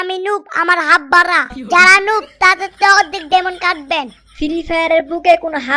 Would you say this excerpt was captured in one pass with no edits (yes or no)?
yes